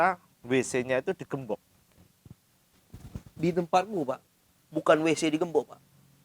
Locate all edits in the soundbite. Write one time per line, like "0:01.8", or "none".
none